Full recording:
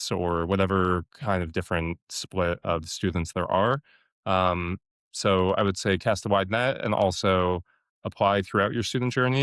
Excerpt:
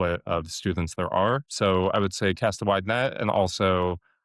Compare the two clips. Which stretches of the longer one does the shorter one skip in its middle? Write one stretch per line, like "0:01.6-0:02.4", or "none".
0:03.9-0:05.1